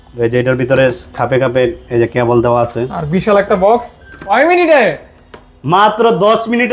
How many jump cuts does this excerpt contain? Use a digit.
1